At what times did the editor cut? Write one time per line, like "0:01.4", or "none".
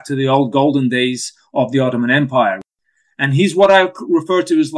0:02.6